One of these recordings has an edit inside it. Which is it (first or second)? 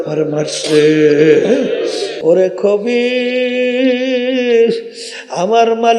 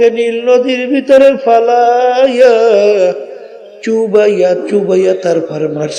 first